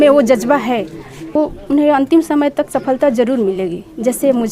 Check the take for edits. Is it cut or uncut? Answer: cut